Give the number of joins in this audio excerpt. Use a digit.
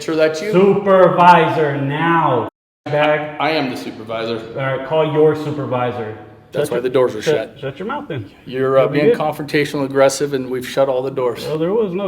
1